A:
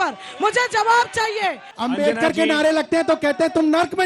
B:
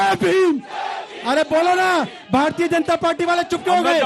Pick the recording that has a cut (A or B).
A